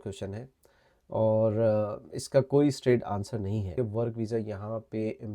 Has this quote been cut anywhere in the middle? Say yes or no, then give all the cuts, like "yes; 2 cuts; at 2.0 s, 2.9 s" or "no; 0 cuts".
yes; 1 cut; at 3.7 s